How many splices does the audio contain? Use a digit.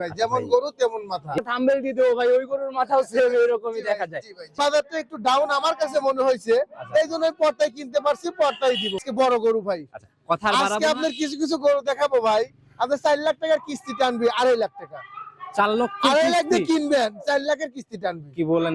3